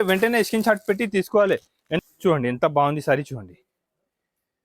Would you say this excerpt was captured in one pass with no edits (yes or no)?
no